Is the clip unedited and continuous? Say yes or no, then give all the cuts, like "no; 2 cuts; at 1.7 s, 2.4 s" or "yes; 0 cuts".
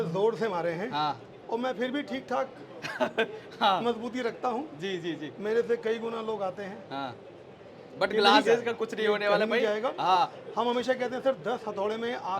no; 1 cut; at 1.3 s